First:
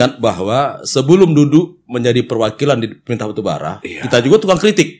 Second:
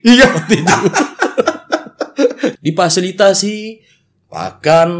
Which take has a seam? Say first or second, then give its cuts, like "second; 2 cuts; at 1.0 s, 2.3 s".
second; 1 cut; at 2.5 s